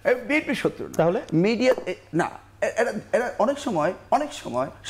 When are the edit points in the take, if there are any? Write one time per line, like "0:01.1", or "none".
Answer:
none